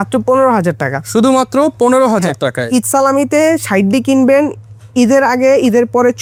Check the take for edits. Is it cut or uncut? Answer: uncut